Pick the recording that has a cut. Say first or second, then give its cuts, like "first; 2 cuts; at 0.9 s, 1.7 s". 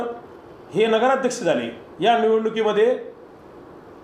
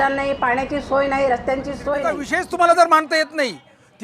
second; 1 cut; at 2.2 s